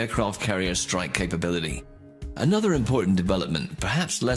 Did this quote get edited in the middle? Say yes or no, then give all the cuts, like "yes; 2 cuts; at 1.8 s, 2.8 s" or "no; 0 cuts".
yes; 1 cut; at 1.5 s